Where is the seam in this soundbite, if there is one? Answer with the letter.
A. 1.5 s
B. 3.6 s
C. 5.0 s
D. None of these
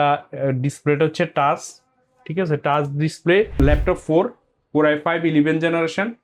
B